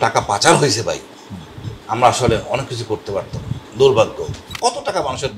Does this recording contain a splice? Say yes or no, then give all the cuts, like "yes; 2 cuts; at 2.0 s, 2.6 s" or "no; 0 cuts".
yes; 1 cut; at 4.4 s